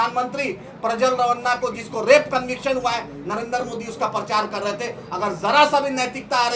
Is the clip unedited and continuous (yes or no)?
yes